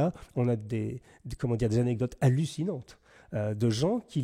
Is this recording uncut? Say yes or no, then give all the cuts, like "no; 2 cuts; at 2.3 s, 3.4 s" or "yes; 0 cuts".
yes; 0 cuts